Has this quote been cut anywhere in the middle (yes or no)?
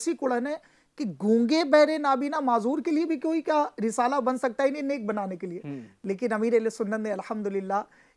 no